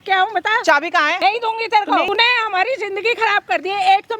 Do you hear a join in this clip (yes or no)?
yes